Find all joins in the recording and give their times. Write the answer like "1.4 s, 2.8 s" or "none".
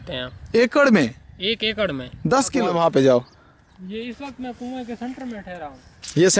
2.7 s